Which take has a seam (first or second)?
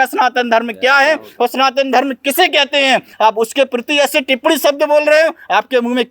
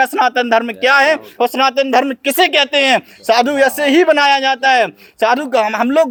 first